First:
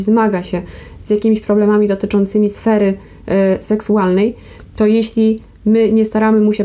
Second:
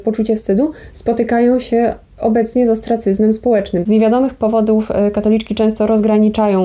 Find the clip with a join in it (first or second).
second